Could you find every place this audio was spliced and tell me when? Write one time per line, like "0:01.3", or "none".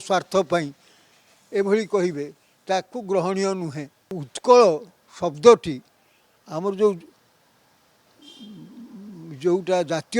0:04.3